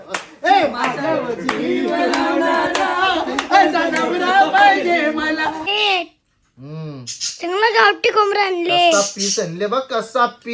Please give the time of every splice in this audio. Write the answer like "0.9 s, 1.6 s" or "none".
5.6 s